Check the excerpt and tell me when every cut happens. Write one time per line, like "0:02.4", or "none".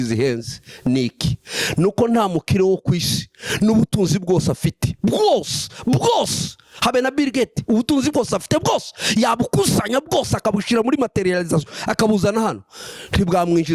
none